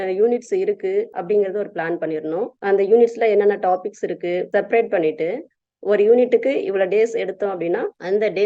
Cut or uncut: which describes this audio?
uncut